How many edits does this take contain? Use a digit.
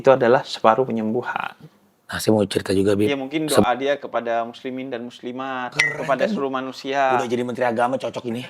1